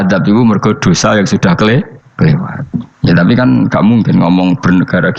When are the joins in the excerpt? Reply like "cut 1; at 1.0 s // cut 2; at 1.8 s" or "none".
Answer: none

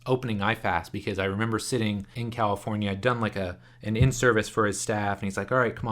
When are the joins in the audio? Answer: cut 1; at 2.2 s

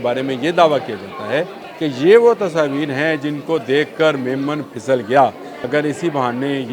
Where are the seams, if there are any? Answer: cut 1; at 1.6 s // cut 2; at 5.5 s

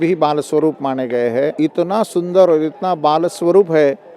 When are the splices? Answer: cut 1; at 1.5 s

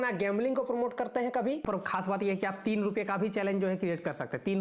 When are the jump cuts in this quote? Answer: cut 1; at 1.6 s

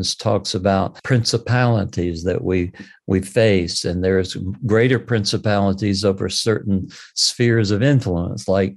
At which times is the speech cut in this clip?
cut 1; at 1.0 s

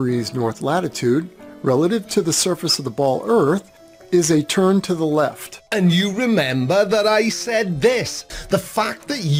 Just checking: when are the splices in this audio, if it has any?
none

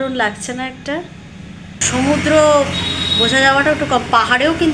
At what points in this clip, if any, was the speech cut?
cut 1; at 1.8 s

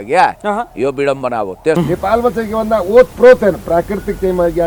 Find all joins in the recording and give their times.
cut 1; at 1.8 s

